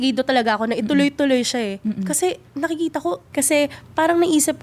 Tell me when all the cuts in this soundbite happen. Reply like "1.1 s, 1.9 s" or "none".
3.2 s

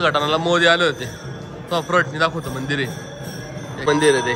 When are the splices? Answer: none

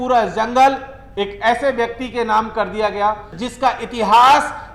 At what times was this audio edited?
none

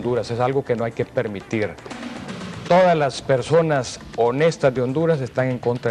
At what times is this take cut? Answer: none

